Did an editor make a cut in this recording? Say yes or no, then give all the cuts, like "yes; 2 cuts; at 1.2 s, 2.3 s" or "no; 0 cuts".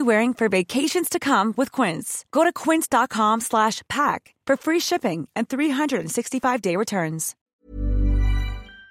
yes; 1 cut; at 7.3 s